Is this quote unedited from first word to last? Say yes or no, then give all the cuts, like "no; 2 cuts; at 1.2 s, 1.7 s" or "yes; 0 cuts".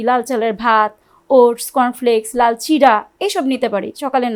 yes; 0 cuts